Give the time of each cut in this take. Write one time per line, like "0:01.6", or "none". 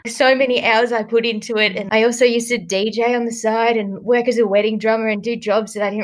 none